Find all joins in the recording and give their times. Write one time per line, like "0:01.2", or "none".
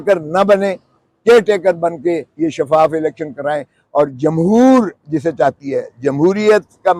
none